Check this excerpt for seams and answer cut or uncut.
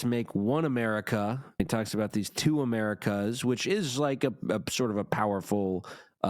cut